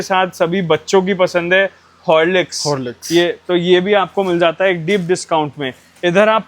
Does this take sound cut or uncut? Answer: uncut